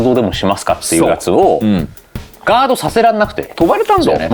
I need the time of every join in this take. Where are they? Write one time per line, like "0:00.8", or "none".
none